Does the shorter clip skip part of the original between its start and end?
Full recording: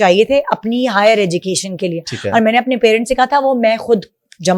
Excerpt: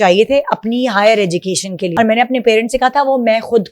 yes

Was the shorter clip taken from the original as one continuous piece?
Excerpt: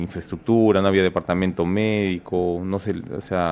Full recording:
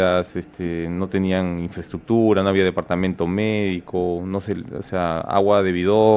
yes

